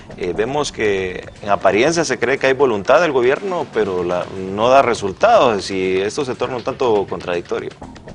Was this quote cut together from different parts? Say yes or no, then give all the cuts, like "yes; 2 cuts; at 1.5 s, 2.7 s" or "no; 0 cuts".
yes; 1 cut; at 0.9 s